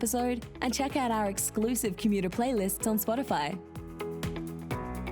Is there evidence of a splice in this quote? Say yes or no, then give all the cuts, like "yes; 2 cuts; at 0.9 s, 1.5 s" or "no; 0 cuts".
yes; 1 cut; at 3.7 s